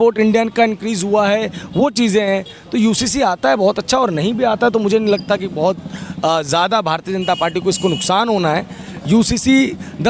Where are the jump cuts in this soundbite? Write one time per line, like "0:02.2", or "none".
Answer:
none